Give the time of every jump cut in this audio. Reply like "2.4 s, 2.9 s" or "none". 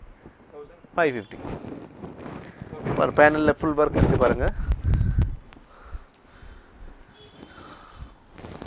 none